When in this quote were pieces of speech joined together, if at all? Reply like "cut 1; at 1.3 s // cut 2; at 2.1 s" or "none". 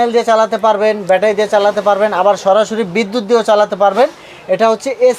none